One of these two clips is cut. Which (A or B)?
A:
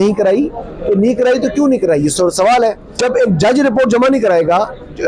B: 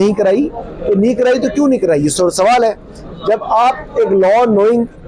A